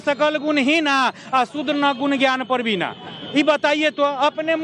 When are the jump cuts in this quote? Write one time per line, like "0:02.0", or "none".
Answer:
none